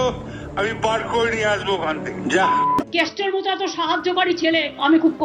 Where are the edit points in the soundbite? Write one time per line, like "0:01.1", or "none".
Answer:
0:02.8